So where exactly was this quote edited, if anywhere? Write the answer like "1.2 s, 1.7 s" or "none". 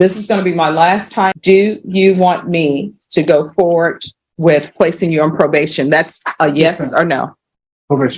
1.4 s